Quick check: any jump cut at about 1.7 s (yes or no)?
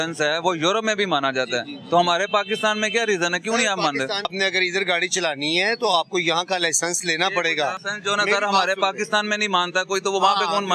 no